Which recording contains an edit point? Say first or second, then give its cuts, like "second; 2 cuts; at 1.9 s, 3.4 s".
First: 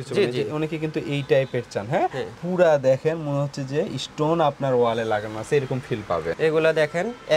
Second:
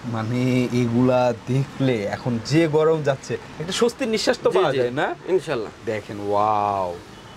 first; 1 cut; at 6.3 s